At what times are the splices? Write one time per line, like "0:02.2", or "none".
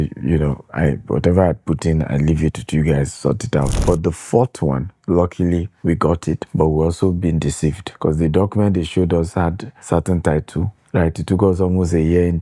0:03.8
0:04.9
0:05.7
0:07.9
0:09.7